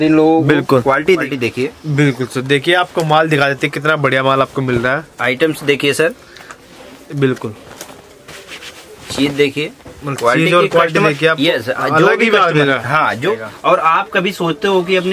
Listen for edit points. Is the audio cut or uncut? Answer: cut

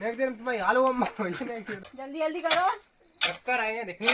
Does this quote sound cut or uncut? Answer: cut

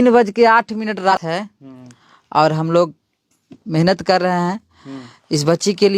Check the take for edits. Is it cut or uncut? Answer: cut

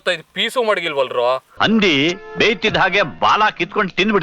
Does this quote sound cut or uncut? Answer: cut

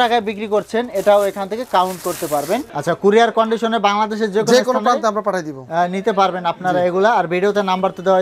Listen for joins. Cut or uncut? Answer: cut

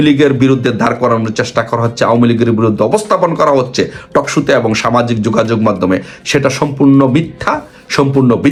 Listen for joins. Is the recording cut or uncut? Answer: uncut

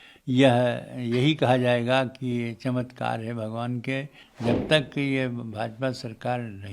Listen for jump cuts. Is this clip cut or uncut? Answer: cut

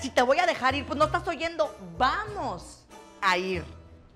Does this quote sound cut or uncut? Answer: uncut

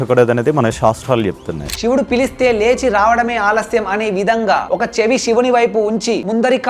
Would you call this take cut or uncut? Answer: cut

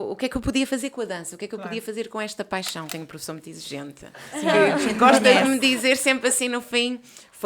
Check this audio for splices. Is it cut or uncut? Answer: cut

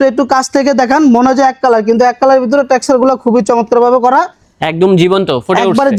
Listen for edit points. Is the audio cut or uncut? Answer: uncut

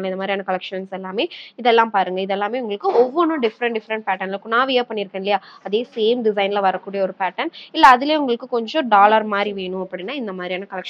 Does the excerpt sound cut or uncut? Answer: uncut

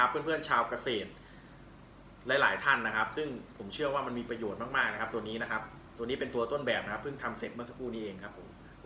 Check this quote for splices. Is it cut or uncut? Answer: uncut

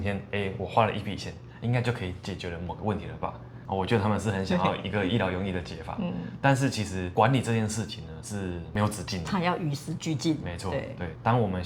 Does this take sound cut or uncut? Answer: uncut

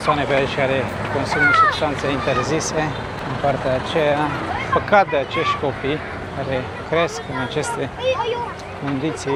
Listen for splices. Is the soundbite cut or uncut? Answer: uncut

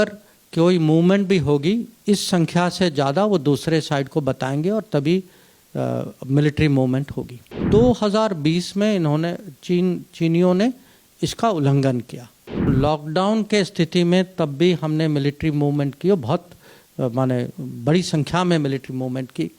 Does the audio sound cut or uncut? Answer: cut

